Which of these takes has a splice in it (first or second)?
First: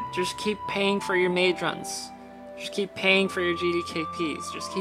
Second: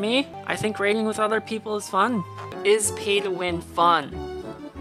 second